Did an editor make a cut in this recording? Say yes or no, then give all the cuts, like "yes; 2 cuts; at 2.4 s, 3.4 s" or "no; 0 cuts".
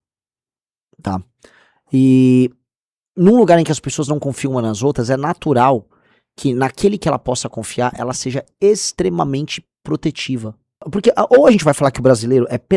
yes; 1 cut; at 10.9 s